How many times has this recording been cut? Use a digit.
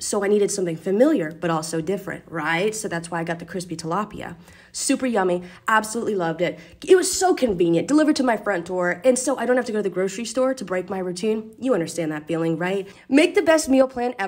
1